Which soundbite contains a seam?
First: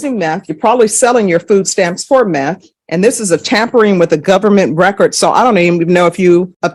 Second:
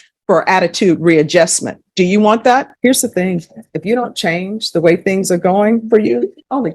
second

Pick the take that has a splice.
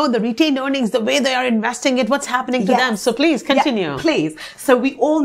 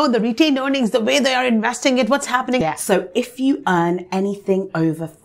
second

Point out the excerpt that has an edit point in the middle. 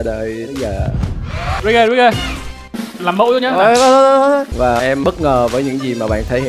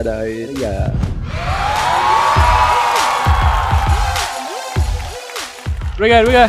first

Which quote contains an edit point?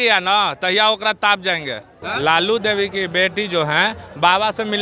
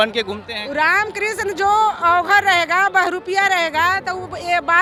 first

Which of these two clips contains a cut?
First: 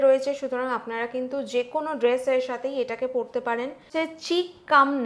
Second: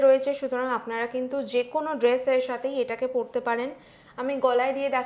first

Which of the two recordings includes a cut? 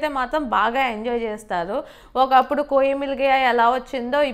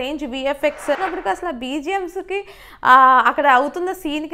second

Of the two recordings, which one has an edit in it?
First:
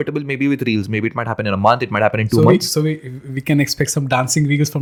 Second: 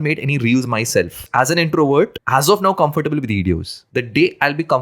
second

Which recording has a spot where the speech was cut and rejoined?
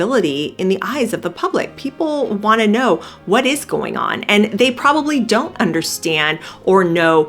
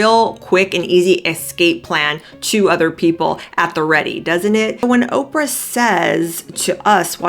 second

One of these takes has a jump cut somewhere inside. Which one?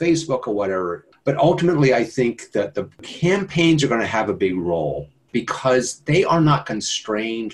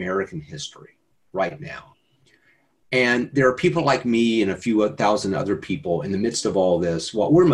first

